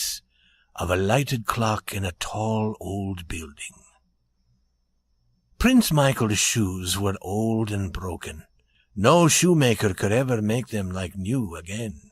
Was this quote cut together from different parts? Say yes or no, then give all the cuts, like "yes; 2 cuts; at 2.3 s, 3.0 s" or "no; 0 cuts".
yes; 1 cut; at 5.9 s